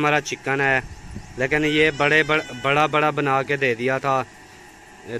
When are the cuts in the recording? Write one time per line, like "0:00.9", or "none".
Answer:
none